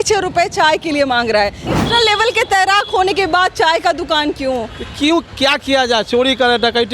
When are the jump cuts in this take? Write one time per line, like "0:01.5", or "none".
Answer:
0:01.7